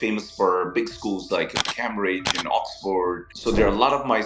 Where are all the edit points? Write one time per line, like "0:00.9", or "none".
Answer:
0:03.3